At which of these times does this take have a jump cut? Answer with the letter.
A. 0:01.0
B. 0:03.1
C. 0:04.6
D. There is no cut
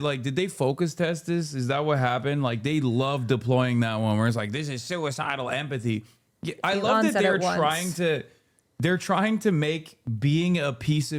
D